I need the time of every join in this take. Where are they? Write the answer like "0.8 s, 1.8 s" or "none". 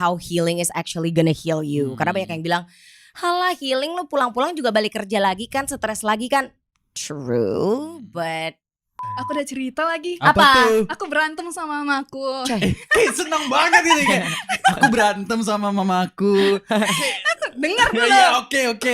9.0 s